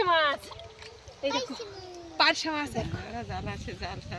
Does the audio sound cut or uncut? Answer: cut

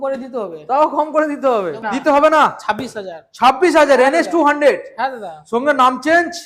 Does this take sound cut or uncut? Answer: cut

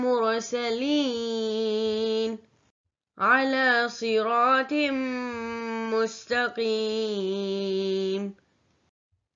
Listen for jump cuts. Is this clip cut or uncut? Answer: uncut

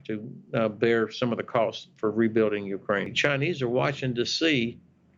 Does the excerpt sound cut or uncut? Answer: cut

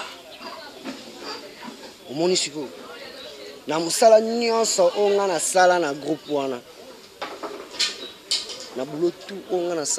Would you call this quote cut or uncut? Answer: uncut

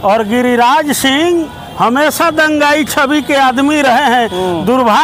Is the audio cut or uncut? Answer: uncut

